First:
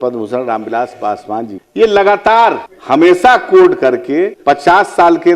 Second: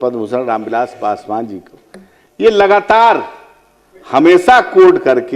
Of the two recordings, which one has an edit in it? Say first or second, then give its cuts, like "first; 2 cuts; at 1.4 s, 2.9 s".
first; 3 cuts; at 1.6 s, 2.7 s, 4.4 s